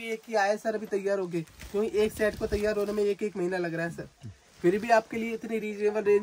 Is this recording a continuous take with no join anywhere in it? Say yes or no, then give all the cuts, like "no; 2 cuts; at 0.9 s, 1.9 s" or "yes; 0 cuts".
yes; 0 cuts